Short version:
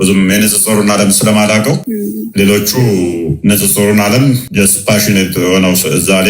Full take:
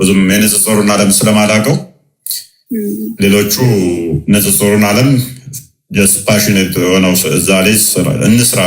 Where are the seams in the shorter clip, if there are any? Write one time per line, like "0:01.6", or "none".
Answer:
0:01.8
0:04.5